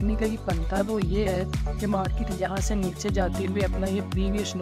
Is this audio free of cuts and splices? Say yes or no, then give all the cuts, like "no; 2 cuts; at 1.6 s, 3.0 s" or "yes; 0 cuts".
yes; 0 cuts